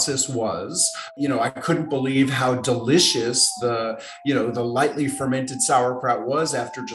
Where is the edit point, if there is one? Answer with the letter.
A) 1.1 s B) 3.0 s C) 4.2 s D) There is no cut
A